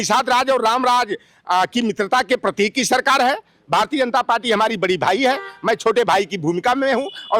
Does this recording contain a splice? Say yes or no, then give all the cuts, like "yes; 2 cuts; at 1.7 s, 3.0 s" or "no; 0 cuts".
no; 0 cuts